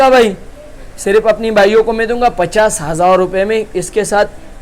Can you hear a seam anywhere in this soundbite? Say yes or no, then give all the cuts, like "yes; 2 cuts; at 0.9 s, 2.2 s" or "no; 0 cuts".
no; 0 cuts